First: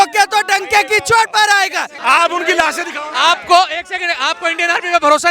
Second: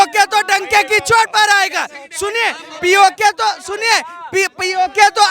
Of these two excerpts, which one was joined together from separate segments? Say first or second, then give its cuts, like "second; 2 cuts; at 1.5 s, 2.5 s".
first; 1 cut; at 1.9 s